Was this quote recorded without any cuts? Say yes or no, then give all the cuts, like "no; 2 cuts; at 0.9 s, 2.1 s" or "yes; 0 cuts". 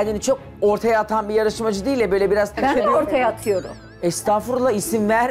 no; 1 cut; at 2.6 s